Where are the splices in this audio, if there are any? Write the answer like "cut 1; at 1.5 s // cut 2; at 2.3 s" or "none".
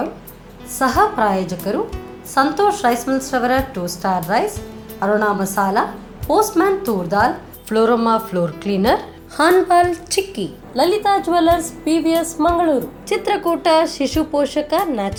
none